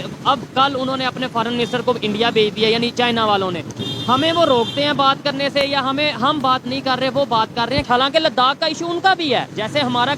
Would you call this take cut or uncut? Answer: uncut